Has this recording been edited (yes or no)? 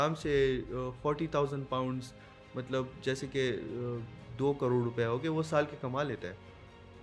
no